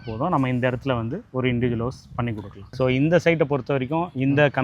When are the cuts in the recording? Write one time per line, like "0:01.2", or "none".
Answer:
0:02.7